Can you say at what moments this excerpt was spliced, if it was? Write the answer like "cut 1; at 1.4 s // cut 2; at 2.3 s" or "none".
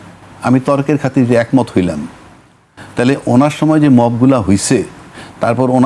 none